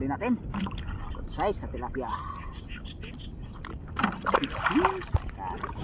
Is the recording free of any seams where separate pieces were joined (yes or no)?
yes